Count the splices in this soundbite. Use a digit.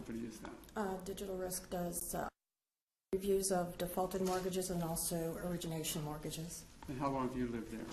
1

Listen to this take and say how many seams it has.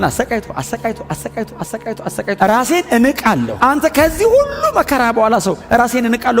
1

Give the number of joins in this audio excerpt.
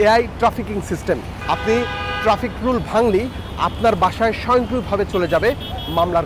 1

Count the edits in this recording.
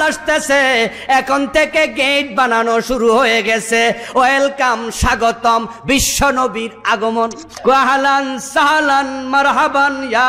1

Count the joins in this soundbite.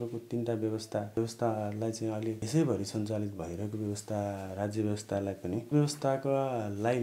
3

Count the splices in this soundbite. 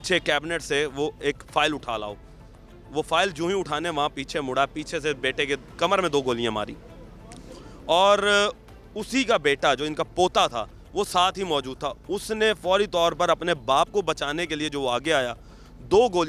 0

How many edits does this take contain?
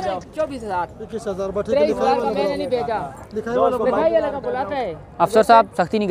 0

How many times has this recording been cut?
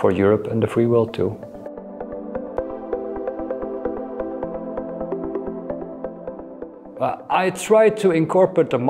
0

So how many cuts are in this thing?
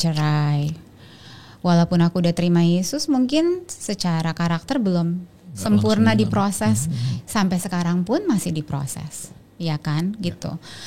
0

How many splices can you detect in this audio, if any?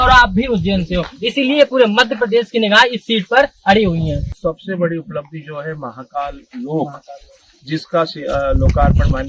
1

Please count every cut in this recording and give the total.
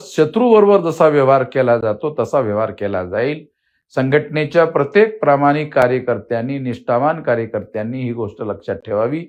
0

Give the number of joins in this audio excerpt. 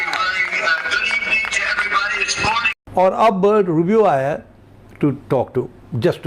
1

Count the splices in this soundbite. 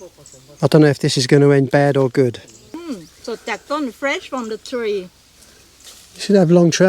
1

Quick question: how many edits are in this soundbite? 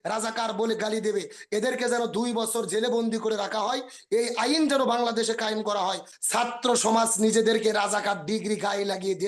1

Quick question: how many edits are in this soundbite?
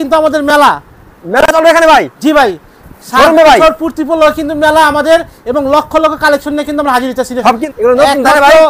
1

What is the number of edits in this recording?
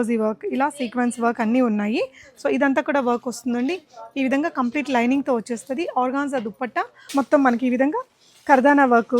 1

